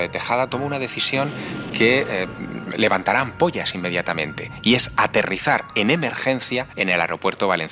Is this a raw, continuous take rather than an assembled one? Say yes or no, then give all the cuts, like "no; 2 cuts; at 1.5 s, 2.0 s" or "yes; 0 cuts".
no; 1 cut; at 6.7 s